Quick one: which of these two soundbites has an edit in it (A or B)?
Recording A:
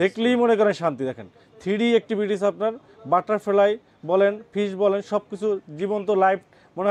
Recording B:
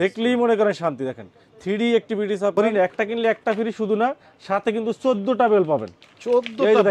B